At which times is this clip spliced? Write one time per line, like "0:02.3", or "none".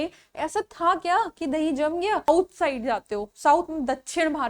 0:02.3